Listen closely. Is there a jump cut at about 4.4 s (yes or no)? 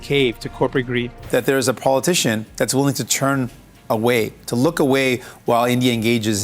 no